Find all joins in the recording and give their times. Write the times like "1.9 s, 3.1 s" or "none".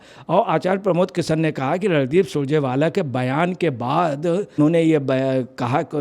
4.6 s